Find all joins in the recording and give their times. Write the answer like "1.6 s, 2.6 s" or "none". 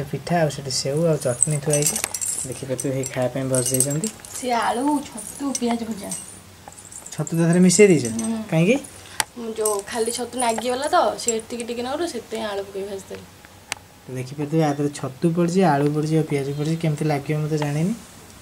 none